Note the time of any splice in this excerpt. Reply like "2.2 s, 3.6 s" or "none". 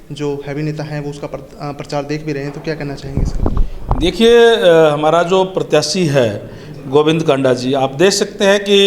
none

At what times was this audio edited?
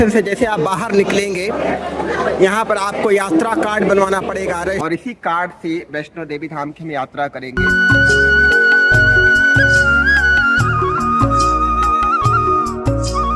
4.8 s, 7.9 s

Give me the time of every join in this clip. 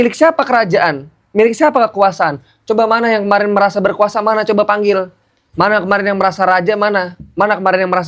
none

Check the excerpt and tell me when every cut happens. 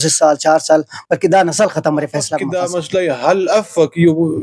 2.4 s

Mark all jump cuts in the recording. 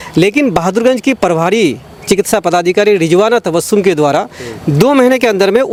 none

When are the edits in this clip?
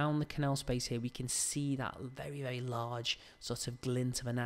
none

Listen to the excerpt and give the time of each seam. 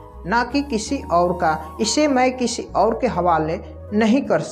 none

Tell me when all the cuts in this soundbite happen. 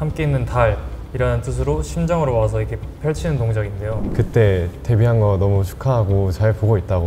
4.0 s

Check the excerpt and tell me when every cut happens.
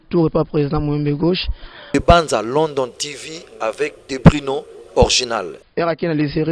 1.8 s, 5.5 s

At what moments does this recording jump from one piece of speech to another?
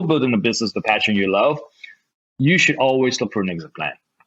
none

